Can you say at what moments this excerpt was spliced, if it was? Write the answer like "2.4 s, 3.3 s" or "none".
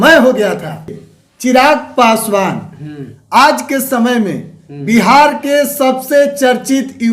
0.9 s